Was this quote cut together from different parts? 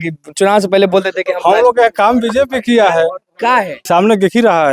yes; 1 cut; at 3.8 s

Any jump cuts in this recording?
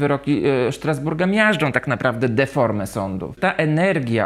yes; 1 cut; at 3.3 s

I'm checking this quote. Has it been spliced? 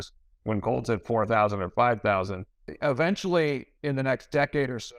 yes; 1 cut; at 2.7 s

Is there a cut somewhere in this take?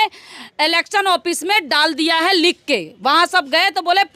no; 0 cuts

